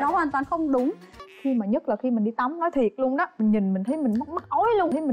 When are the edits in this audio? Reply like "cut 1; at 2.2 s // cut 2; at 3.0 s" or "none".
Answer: cut 1; at 1.1 s